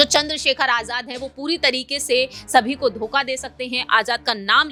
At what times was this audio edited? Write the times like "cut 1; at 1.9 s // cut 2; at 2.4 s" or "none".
none